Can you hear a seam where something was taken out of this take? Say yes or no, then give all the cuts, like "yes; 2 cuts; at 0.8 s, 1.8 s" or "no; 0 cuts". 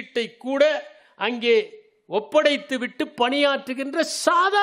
no; 0 cuts